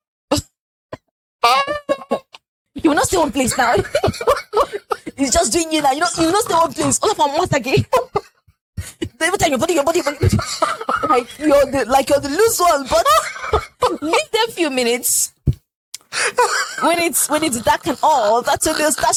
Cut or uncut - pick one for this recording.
uncut